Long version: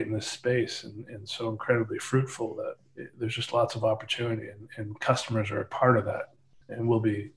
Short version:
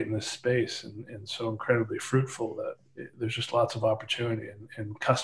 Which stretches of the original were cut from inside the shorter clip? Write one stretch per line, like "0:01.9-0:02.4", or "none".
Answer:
none

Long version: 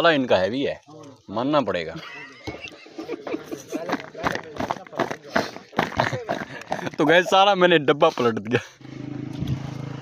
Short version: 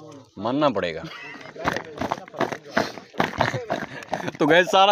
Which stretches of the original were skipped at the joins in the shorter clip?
0:02.4-0:04.1

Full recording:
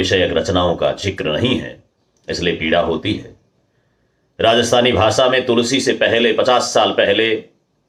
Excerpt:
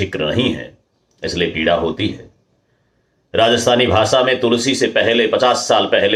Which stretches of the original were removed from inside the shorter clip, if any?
none

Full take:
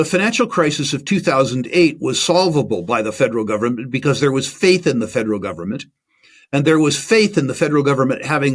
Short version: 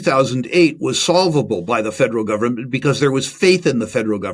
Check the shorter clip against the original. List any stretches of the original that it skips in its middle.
none

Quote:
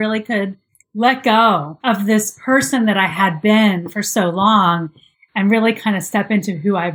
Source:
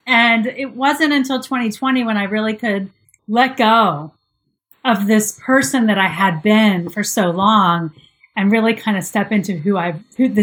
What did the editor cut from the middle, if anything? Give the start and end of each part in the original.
0:04.0-0:04.7

